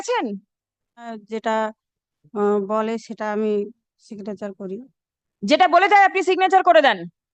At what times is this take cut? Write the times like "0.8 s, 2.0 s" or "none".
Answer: 1.2 s